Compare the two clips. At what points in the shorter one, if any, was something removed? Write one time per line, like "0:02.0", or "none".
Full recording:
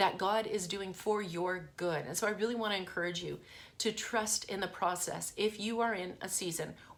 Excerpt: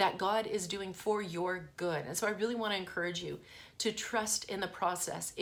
none